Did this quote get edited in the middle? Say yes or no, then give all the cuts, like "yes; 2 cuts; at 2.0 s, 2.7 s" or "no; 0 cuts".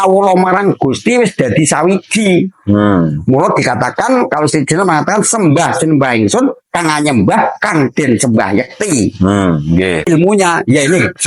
yes; 1 cut; at 10.1 s